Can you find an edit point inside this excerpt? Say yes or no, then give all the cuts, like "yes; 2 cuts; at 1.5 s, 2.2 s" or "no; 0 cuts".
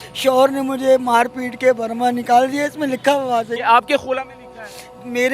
yes; 1 cut; at 3.5 s